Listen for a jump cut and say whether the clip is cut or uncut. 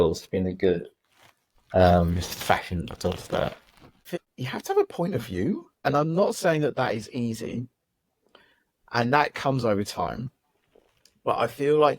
cut